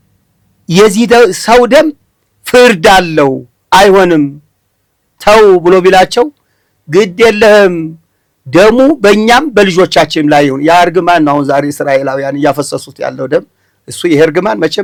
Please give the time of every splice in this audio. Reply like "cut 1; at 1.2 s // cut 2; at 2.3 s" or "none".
none